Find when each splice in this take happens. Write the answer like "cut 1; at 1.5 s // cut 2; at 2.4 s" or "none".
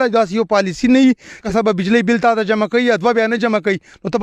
cut 1; at 1.4 s

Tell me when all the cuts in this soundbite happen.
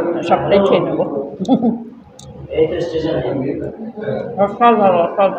none

